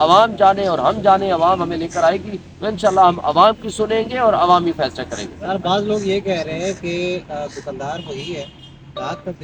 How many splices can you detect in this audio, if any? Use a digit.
0